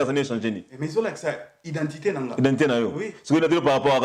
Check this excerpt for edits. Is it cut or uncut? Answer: uncut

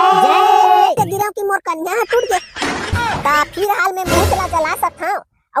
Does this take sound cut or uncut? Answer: cut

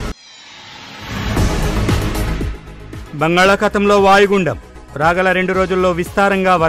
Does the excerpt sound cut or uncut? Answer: uncut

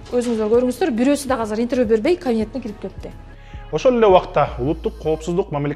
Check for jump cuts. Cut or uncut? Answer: uncut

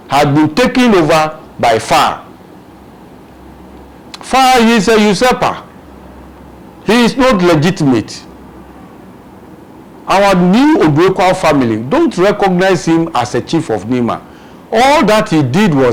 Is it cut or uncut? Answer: uncut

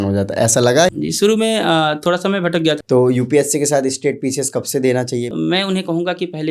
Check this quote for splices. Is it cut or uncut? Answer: cut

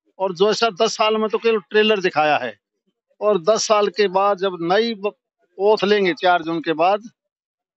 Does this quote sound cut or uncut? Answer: uncut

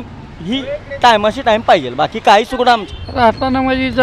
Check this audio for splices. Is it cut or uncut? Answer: cut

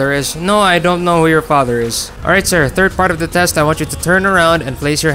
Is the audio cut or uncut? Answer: cut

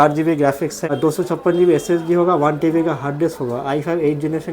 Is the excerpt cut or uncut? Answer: cut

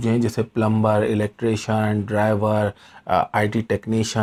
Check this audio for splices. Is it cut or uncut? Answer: uncut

